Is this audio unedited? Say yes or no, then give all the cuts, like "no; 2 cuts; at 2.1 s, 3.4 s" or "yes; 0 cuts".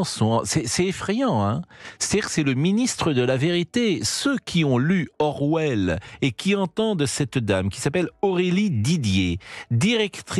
yes; 0 cuts